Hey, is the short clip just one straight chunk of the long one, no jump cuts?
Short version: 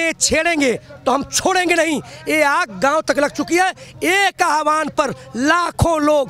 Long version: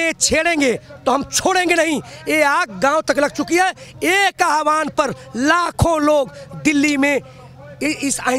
yes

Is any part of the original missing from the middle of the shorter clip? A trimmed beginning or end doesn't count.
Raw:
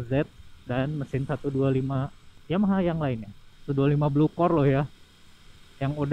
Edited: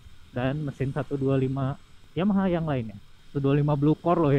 no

